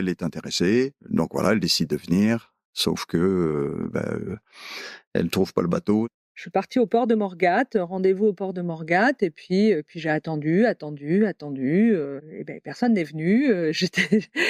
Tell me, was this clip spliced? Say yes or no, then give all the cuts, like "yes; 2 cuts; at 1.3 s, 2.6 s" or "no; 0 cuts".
no; 0 cuts